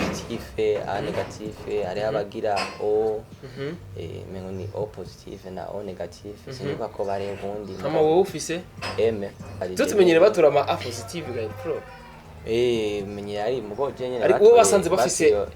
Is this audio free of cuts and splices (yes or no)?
no